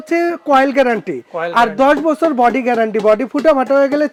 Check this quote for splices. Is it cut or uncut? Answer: uncut